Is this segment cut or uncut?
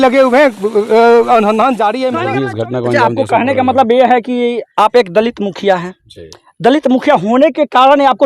cut